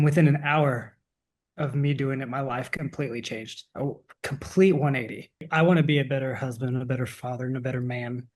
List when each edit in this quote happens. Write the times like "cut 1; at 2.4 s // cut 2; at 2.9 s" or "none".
cut 1; at 5.5 s

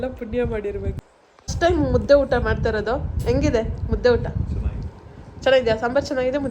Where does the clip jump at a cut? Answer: cut 1; at 1.0 s

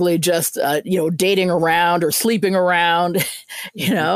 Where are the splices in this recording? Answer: none

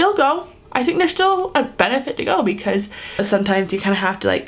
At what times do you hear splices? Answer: cut 1; at 3.2 s

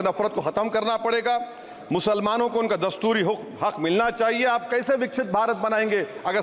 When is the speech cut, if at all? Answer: none

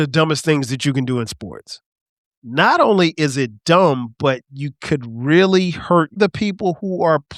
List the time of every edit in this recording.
cut 1; at 6.2 s

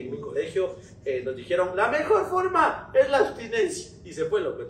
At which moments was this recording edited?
none

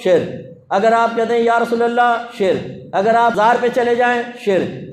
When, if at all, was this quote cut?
cut 1; at 3.3 s

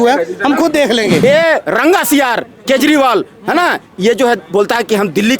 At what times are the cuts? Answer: cut 1; at 1.2 s

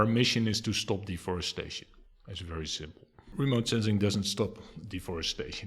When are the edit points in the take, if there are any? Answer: cut 1; at 3.2 s

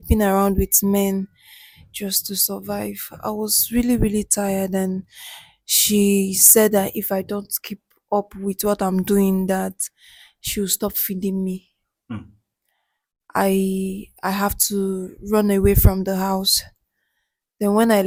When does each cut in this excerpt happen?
none

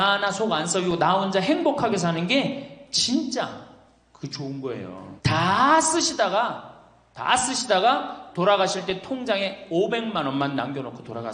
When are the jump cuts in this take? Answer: cut 1; at 5.0 s

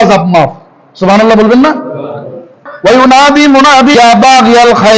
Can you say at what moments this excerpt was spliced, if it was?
cut 1; at 2.6 s // cut 2; at 3.9 s

